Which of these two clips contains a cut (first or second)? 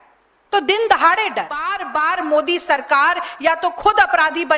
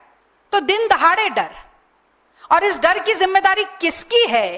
first